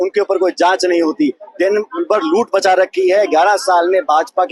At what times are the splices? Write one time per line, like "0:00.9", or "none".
none

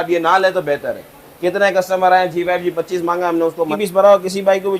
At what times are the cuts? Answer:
0:03.7

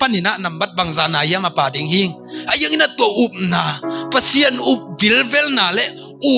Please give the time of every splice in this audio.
none

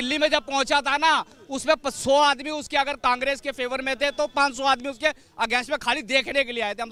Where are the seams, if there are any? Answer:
none

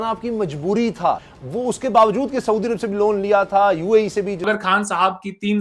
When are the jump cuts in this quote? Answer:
0:01.2
0:04.4

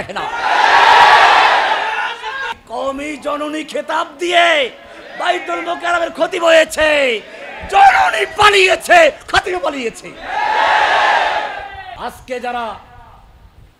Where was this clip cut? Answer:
0:02.5
0:11.9

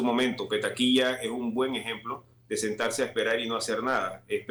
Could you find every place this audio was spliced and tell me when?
none

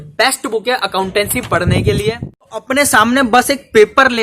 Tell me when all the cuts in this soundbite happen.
0:02.3

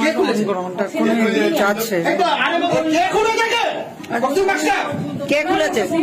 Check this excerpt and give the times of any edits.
none

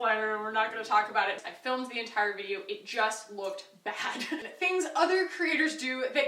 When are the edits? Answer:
0:01.4
0:04.5

